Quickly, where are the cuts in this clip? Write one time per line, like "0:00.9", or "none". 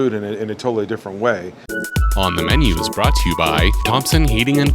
0:01.7

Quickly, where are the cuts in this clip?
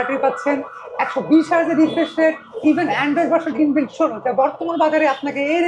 none

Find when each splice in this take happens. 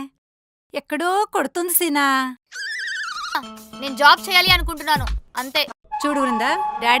0:03.4

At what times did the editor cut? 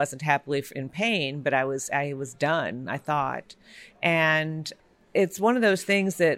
0:05.1

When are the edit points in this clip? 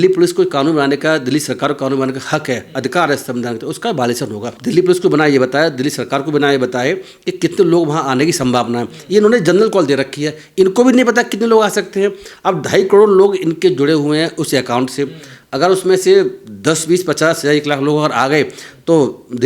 0:04.5

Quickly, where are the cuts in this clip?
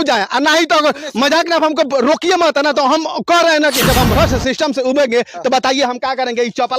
0:03.9

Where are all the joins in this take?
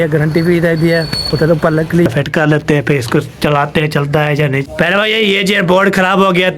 0:02.1
0:04.6

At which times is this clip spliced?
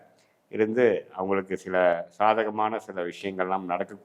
none

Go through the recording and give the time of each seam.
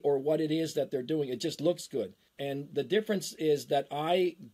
0:02.3

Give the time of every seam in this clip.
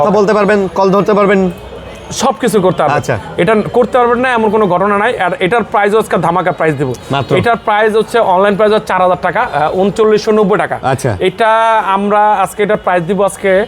none

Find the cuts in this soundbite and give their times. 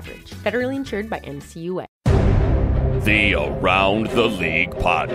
0:01.9

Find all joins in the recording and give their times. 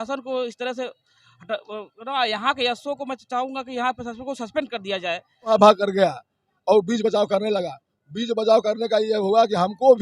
0:05.6

